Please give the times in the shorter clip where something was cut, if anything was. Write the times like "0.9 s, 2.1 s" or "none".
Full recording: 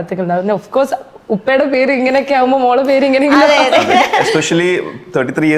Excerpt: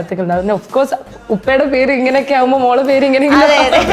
none